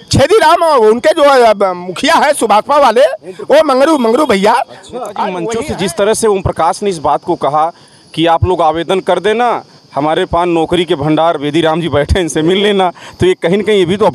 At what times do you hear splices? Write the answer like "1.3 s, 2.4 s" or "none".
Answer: 5.4 s